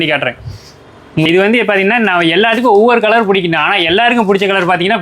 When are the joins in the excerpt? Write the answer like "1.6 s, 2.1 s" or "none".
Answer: 1.2 s